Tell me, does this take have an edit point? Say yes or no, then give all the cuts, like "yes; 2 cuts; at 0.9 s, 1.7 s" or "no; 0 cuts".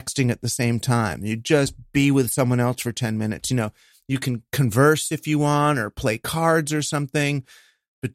no; 0 cuts